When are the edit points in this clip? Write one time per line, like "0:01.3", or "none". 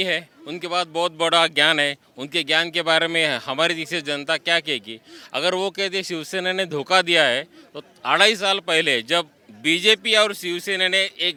none